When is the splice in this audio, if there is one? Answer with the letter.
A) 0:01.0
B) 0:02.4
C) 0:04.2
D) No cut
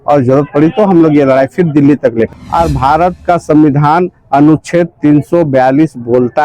B